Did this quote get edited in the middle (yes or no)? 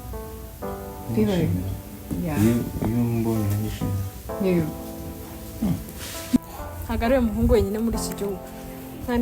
yes